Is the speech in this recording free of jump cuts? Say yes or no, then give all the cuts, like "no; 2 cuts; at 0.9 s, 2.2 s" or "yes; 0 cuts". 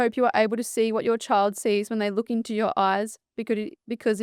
yes; 0 cuts